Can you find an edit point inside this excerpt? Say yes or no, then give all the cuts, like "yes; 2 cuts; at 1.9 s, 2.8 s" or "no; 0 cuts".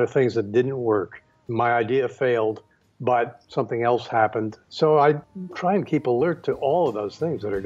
yes; 3 cuts; at 1.4 s, 4.6 s, 5.2 s